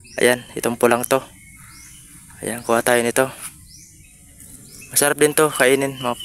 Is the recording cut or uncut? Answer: uncut